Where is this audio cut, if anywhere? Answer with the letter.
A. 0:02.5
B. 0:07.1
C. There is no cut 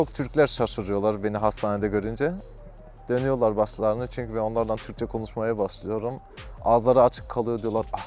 C